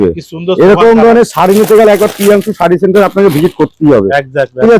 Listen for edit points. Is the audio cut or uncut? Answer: uncut